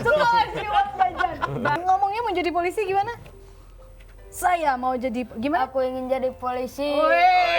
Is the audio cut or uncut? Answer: cut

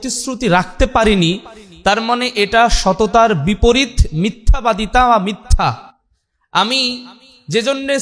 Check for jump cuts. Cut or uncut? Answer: uncut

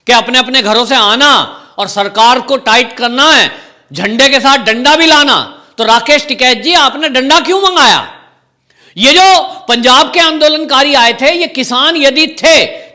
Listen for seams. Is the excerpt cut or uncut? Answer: uncut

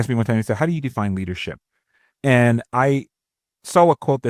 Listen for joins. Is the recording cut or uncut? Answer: uncut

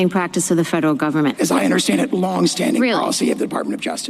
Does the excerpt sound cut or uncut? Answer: cut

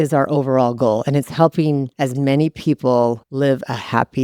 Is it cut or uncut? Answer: cut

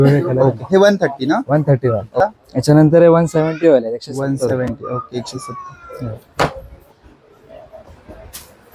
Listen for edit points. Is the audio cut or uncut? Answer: cut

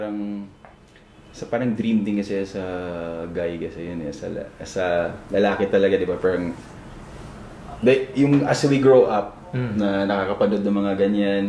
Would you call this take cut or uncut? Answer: uncut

